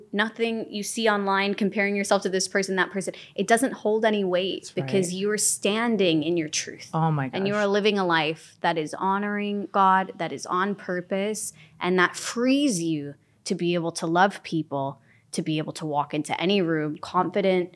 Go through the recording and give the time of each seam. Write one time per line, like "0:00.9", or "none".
none